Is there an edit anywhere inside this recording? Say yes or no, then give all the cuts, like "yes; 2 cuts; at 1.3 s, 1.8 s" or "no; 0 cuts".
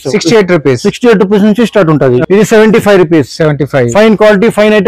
yes; 1 cut; at 2.2 s